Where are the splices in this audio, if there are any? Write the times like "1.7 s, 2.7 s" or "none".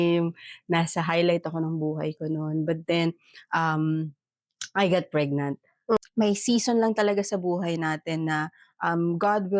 6.0 s